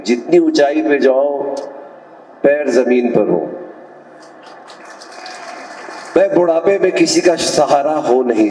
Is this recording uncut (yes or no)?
no